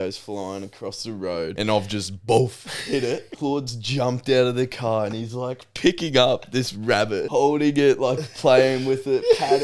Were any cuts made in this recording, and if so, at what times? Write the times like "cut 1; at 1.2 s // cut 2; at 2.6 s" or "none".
cut 1; at 1.5 s // cut 2; at 3.3 s // cut 3; at 7.3 s

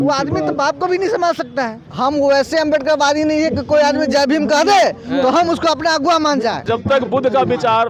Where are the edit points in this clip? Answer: cut 1; at 1.8 s // cut 2; at 6.6 s

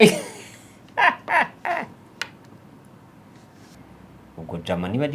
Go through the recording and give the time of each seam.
cut 1; at 3.7 s

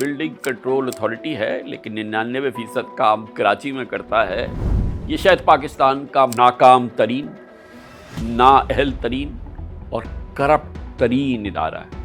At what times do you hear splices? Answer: none

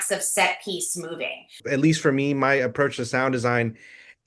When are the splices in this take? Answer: cut 1; at 1.6 s

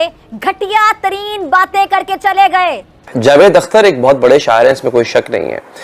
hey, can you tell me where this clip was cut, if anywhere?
cut 1; at 2.9 s

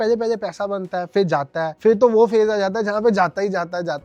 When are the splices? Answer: none

